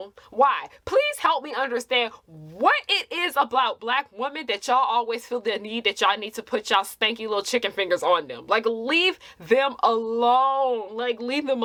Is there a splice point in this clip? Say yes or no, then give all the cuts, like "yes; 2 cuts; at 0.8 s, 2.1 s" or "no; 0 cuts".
no; 0 cuts